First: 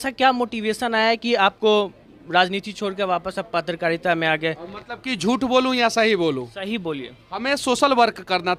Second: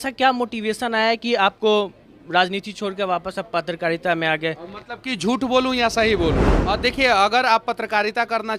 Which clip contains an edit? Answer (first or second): second